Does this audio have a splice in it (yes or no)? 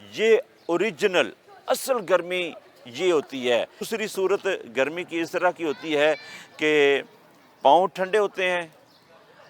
yes